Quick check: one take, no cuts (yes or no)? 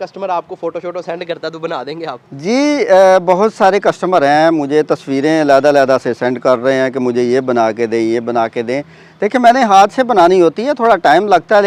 yes